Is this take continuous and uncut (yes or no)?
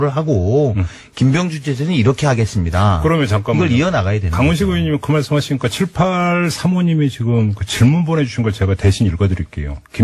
no